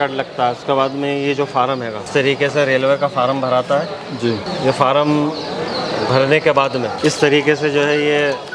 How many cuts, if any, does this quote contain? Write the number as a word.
three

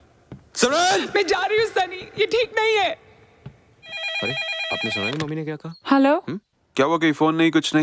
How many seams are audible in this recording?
one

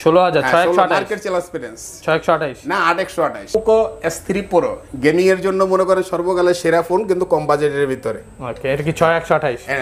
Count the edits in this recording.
one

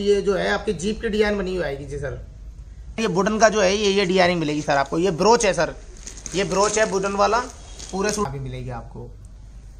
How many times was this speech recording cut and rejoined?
two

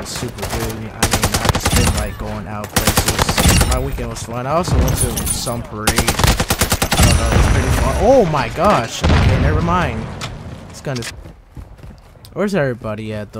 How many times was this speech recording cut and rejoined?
one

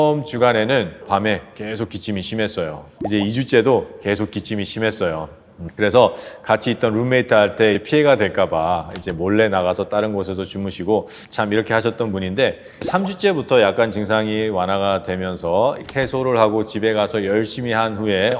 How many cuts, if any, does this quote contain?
one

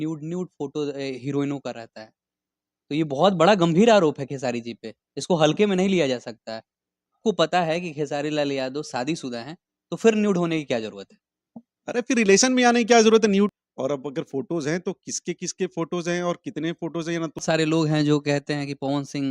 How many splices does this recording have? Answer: three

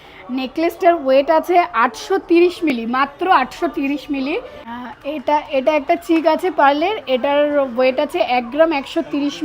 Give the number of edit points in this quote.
one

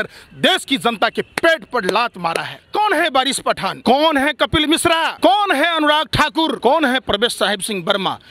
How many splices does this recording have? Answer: four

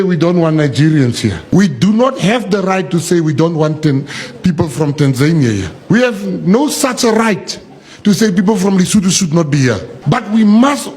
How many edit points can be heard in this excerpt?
three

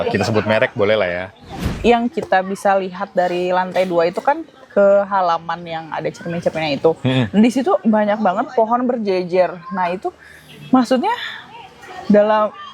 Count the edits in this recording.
one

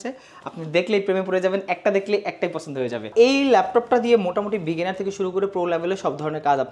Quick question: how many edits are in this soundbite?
one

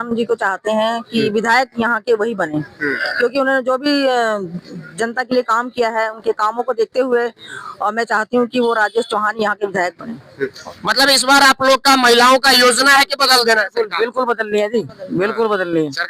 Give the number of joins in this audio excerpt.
one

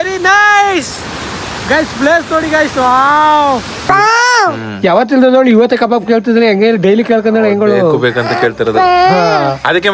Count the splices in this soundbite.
one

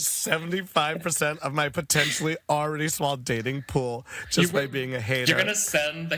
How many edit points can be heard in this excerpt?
zero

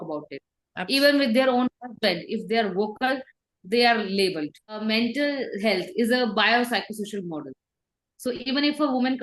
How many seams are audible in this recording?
one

